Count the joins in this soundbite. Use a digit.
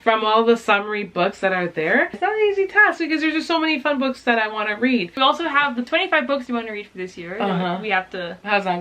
2